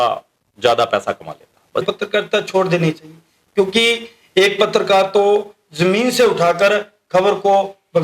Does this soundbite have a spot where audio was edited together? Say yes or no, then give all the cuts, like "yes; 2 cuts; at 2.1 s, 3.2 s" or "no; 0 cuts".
yes; 1 cut; at 1.7 s